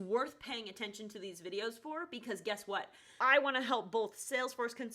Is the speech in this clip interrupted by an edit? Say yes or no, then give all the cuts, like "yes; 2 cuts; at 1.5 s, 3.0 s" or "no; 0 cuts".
yes; 1 cut; at 3.1 s